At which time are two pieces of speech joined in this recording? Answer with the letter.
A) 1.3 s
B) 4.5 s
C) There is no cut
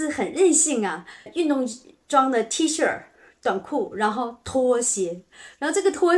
A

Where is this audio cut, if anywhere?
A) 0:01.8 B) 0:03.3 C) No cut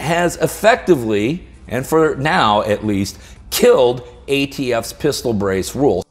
C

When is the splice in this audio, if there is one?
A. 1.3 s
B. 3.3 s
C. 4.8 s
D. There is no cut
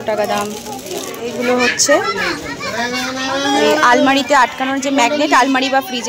A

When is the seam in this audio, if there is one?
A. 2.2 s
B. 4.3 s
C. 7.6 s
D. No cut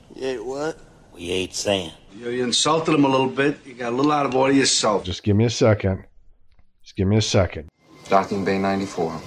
C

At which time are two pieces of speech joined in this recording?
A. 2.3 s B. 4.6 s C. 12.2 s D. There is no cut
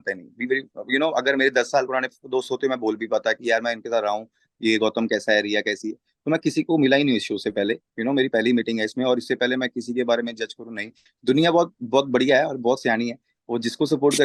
D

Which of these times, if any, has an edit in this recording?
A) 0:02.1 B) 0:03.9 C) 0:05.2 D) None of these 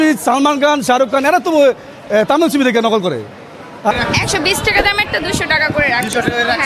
B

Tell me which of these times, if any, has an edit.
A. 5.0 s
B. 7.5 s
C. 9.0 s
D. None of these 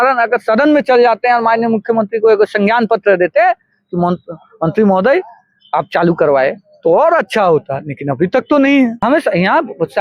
C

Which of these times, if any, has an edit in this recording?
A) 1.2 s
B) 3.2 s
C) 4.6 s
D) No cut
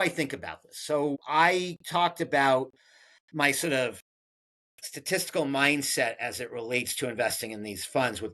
A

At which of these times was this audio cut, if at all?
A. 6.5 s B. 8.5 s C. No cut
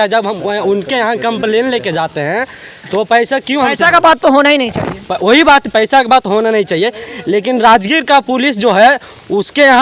C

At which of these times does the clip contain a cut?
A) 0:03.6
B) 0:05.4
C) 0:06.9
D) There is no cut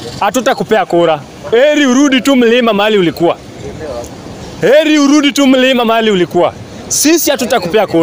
D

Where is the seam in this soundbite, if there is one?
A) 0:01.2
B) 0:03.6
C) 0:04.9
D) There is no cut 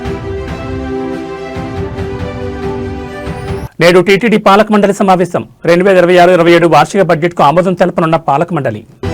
B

